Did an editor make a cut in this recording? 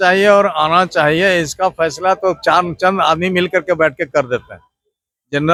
no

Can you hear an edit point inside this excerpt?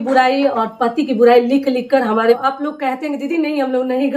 yes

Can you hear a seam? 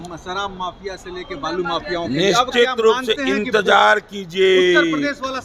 no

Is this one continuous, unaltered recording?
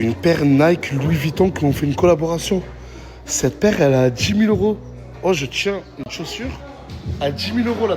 no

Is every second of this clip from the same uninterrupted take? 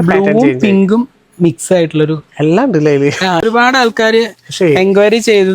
no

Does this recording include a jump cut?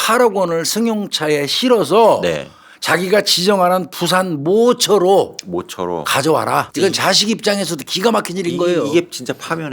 yes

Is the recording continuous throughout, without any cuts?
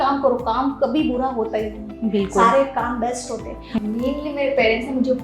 no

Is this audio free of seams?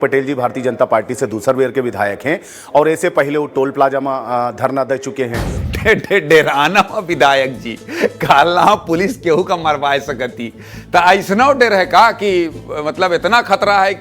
no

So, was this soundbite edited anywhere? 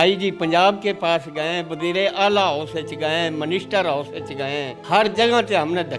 yes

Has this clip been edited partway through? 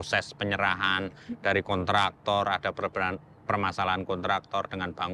no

